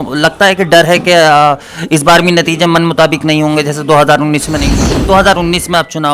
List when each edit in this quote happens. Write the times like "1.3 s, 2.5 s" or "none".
4.9 s